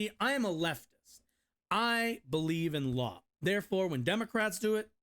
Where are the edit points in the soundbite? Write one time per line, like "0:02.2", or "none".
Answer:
0:03.2